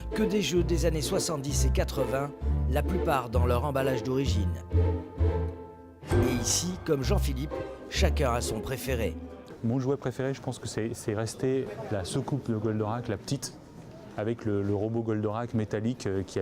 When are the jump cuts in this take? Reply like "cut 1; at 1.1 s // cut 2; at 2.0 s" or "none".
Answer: cut 1; at 4.3 s